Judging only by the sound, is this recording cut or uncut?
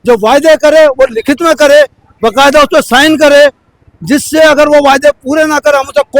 uncut